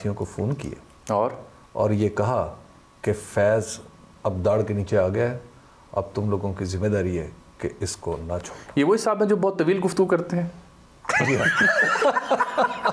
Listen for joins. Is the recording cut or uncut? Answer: uncut